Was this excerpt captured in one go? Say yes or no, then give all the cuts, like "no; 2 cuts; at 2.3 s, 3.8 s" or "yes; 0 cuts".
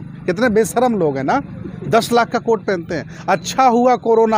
yes; 0 cuts